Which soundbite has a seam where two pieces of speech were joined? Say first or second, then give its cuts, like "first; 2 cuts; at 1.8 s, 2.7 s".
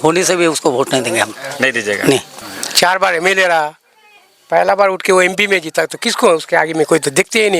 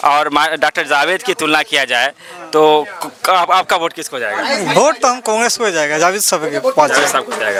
first; 1 cut; at 2.3 s